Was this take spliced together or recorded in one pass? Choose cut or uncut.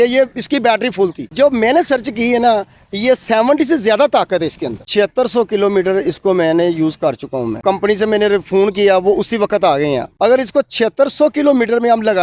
cut